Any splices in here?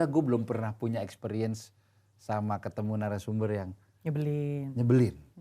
no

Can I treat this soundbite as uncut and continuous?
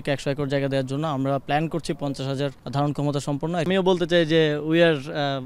no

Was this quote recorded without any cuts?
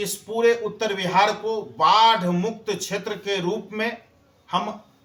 yes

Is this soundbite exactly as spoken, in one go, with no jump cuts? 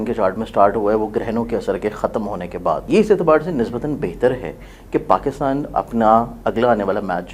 no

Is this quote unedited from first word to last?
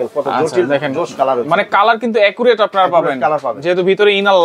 yes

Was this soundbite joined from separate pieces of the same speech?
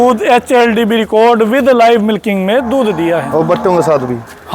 no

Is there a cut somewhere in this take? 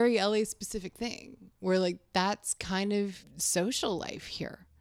yes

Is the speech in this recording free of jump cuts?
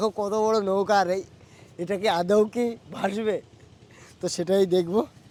yes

